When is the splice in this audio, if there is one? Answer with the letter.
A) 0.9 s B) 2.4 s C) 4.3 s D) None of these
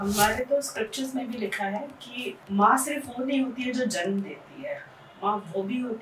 B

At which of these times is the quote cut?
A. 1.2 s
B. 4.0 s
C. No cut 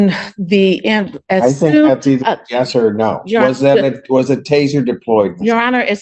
C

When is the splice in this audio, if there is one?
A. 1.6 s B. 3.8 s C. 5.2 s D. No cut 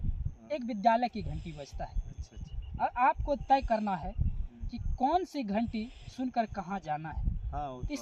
D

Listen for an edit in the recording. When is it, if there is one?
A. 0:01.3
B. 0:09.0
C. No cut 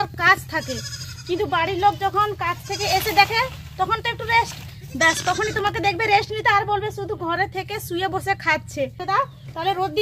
B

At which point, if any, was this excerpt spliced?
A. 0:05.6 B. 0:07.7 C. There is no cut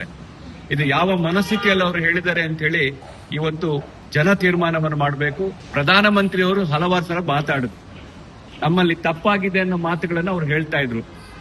A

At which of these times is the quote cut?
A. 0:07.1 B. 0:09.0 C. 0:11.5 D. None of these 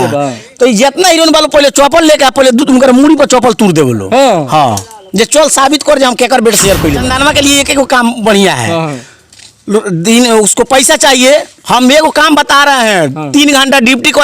A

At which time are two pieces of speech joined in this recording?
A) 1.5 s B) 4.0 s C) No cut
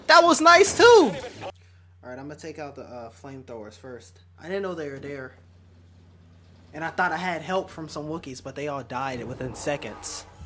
A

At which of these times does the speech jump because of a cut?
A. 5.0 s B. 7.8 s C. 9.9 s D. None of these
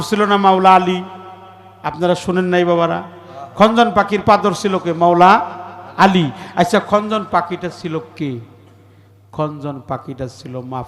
D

